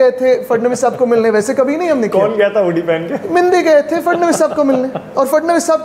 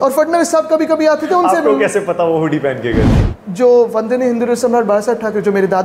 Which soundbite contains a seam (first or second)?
second